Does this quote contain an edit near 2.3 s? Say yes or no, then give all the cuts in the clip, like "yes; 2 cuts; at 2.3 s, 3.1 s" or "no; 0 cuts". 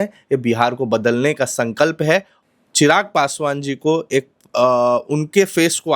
yes; 1 cut; at 2.3 s